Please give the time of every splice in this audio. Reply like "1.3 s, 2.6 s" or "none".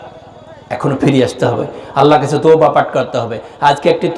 none